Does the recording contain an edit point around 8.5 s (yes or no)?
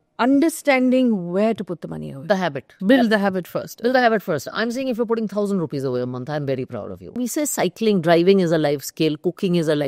no